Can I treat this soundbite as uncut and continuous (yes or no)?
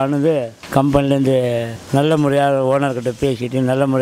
yes